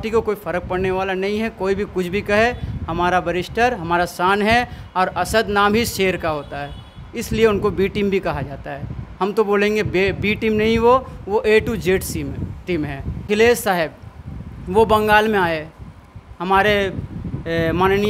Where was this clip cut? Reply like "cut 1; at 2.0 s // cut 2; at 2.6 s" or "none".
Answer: cut 1; at 13.2 s